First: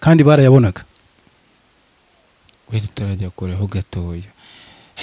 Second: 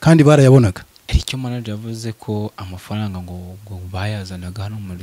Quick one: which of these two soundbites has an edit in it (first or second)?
second